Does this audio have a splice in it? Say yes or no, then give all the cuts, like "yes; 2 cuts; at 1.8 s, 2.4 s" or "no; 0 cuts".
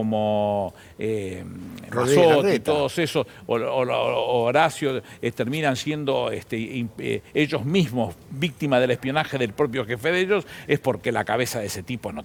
no; 0 cuts